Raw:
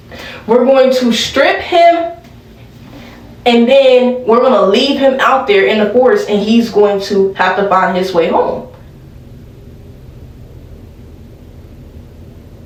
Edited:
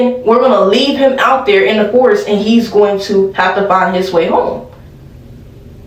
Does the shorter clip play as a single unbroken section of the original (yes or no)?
yes